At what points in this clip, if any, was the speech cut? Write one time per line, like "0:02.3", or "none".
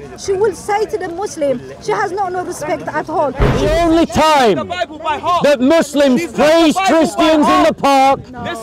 0:03.5